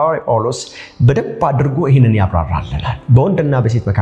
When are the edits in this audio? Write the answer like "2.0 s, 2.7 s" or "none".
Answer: none